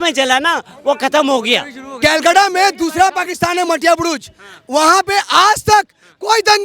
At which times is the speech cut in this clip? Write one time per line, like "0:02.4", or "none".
0:01.9